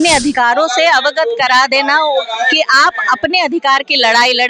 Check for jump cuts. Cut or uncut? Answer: uncut